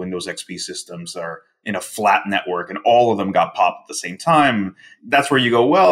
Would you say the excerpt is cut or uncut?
uncut